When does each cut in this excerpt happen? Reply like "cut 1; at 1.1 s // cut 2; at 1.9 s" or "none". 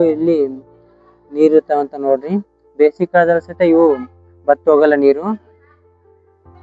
cut 1; at 5.4 s